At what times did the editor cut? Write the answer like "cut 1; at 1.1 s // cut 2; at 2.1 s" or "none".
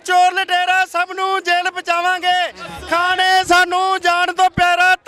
none